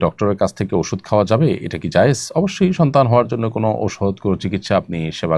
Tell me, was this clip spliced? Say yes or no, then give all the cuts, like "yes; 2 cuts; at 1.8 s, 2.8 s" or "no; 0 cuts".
no; 0 cuts